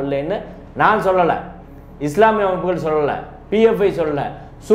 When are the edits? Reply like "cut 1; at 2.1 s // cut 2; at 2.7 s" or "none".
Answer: none